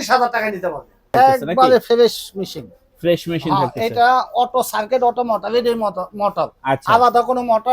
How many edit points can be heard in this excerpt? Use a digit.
1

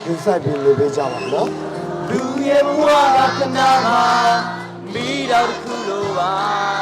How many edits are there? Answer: 1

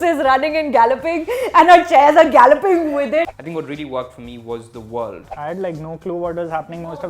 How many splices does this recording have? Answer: 2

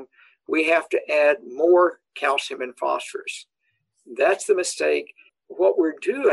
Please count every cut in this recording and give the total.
1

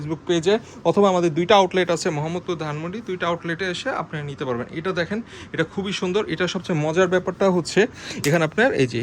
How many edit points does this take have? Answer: 0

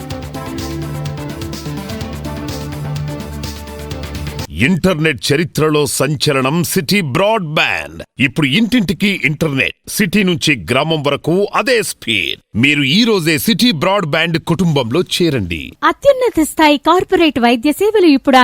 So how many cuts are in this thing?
1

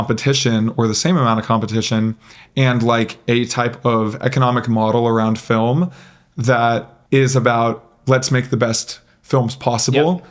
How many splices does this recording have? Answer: 1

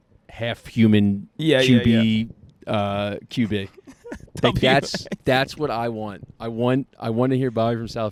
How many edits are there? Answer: 0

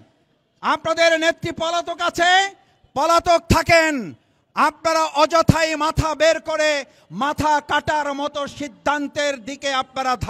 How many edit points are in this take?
0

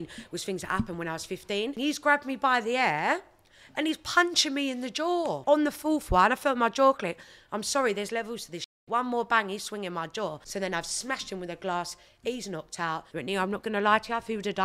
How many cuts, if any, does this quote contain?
4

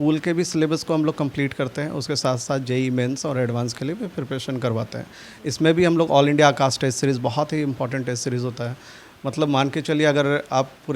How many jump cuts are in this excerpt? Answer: 0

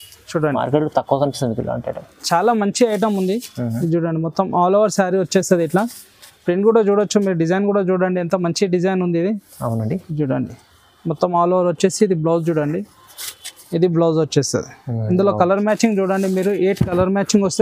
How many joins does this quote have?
0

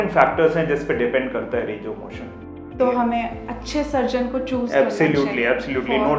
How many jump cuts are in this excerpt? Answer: 1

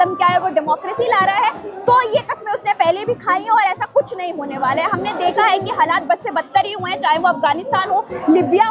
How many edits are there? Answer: 0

